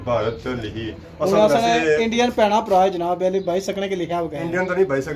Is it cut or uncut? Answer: uncut